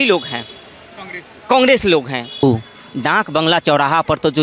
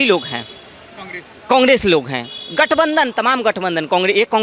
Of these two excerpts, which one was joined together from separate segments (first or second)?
first